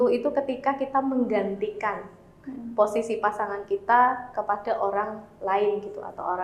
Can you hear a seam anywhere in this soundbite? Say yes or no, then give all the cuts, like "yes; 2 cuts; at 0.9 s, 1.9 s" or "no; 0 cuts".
no; 0 cuts